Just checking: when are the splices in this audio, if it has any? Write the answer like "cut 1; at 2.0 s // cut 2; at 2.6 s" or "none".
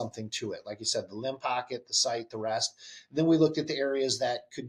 none